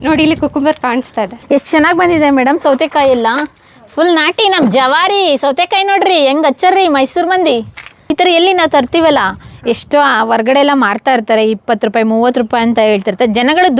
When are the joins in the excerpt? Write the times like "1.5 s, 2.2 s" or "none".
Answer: 1.3 s, 8.0 s